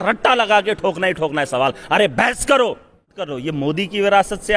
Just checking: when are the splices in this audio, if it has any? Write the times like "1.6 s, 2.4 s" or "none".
3.4 s